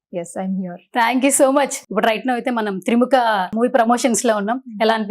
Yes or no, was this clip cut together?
yes